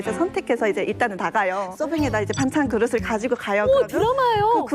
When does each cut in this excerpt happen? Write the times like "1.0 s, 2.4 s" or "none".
1.7 s